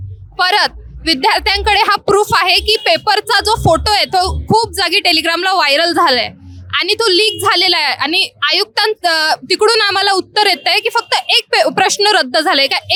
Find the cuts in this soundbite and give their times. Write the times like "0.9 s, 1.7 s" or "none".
none

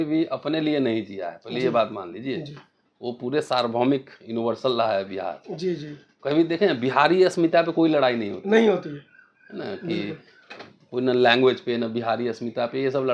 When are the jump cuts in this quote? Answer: none

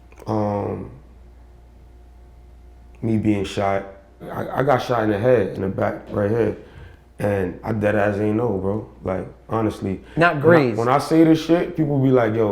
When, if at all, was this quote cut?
4.4 s

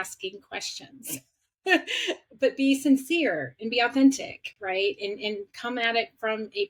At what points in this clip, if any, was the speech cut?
none

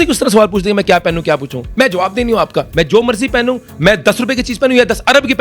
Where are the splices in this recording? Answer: 2.7 s

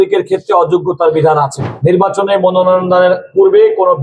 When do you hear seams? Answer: 1.6 s

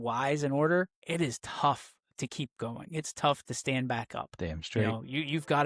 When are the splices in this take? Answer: 1.0 s

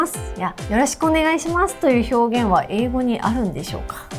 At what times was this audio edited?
none

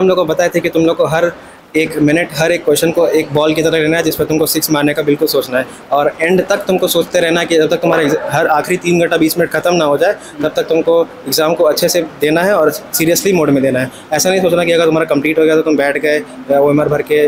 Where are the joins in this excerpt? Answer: none

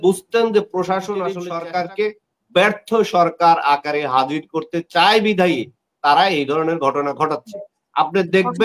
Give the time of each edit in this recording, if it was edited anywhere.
1.5 s

